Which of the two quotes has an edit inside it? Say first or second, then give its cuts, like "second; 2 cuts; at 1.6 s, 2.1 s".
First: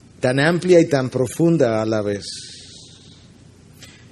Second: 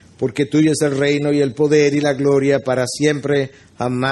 second; 1 cut; at 1.5 s